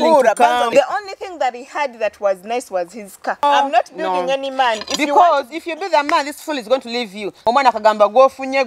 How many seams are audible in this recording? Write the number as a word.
three